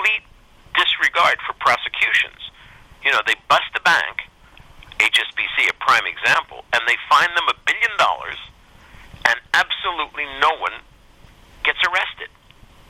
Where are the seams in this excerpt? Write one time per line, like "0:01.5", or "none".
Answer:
none